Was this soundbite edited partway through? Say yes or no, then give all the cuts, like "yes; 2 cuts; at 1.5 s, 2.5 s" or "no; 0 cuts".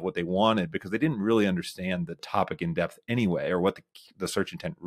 no; 0 cuts